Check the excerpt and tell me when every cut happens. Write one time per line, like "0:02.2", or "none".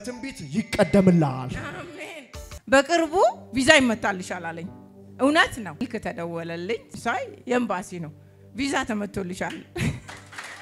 0:02.5
0:05.8
0:07.0